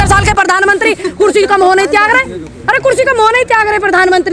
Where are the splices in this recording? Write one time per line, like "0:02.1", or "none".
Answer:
none